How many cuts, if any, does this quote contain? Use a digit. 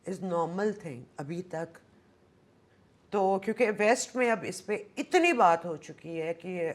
0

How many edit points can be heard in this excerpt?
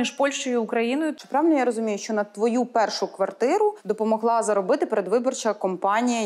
2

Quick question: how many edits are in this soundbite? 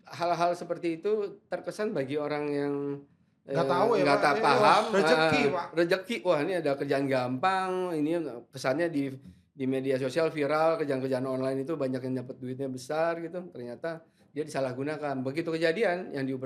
0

